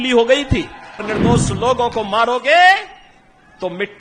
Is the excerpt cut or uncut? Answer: cut